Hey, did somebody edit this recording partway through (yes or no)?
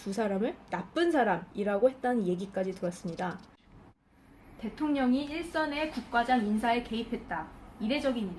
no